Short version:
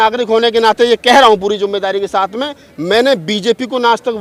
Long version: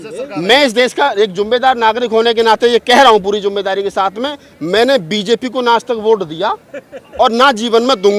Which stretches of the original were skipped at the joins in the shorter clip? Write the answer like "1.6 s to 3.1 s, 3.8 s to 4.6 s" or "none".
none